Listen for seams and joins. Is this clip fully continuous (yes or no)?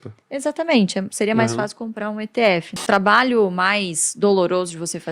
no